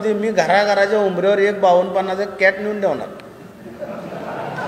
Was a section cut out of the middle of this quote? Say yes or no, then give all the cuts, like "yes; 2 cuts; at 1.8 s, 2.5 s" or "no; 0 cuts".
no; 0 cuts